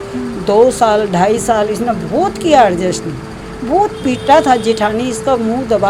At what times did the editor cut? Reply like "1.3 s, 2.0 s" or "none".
none